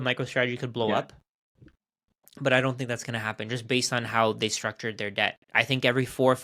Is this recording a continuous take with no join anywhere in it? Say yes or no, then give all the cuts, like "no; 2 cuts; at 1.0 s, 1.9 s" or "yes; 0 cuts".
yes; 0 cuts